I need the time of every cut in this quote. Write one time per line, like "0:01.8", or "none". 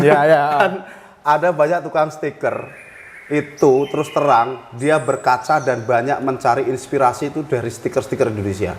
none